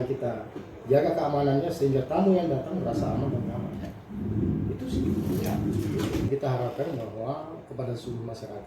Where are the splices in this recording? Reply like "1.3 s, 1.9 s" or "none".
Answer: 6.3 s